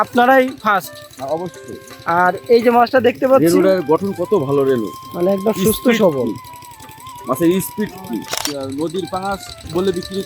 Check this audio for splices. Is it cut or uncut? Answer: cut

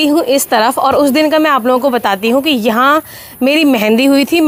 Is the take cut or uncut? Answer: uncut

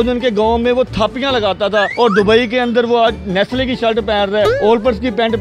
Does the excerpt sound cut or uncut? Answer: cut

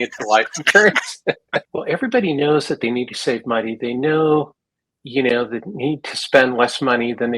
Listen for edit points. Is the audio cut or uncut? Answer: cut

